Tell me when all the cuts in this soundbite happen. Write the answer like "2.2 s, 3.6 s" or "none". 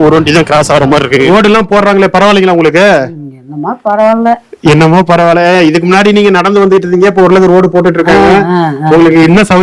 1.3 s